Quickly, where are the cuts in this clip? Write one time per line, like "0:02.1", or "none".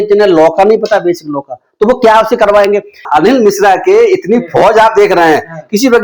0:03.1